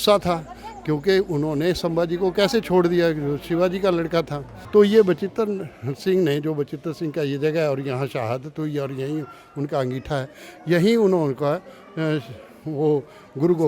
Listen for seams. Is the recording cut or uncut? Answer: cut